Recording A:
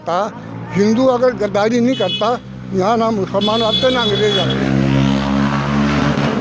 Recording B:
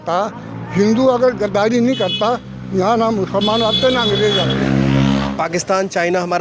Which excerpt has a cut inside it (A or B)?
B